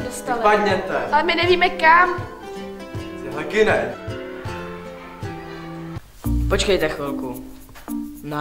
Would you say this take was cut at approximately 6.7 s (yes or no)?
no